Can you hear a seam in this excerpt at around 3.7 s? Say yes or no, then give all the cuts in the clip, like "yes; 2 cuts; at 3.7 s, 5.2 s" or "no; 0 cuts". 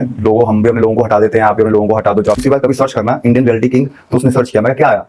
no; 1 cut; at 2.4 s